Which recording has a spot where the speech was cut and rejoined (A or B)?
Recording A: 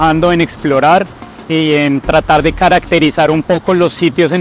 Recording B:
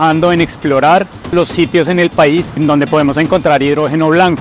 B